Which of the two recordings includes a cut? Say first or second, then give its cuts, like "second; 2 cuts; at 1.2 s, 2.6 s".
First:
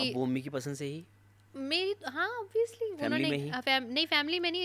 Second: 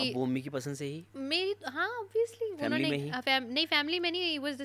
second; 1 cut; at 1.1 s